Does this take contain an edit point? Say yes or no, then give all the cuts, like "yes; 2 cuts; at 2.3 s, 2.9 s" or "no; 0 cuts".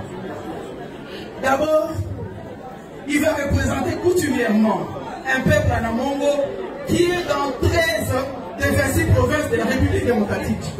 no; 0 cuts